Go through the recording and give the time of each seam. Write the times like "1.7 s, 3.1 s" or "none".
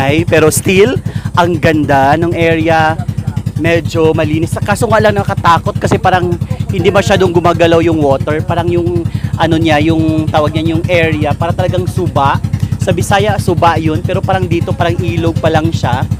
none